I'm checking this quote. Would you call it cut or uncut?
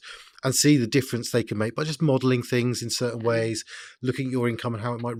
uncut